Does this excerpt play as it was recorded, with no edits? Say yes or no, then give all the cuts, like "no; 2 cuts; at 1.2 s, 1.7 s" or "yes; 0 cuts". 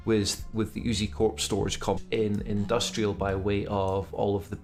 yes; 0 cuts